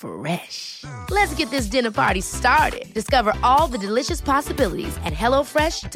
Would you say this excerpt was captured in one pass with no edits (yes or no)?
yes